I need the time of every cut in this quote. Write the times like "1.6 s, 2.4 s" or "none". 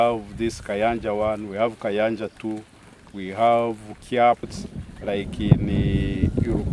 4.4 s